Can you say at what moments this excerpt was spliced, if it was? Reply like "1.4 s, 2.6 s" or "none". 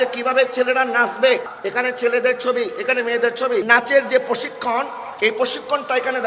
1.5 s, 3.6 s